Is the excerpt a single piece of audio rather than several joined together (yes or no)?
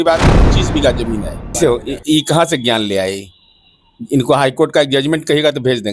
no